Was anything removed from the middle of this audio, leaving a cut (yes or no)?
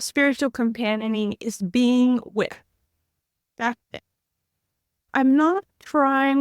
yes